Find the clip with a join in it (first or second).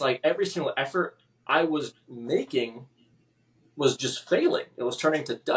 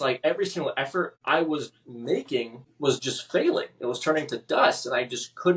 second